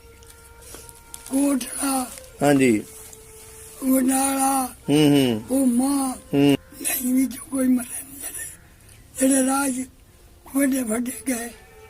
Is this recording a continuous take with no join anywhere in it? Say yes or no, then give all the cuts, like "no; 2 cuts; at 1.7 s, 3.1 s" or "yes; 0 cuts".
no; 1 cut; at 6.6 s